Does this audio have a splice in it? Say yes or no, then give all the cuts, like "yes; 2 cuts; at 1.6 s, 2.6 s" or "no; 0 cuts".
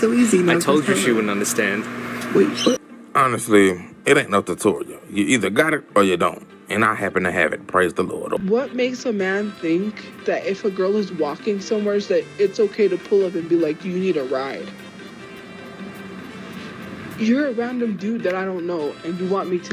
no; 0 cuts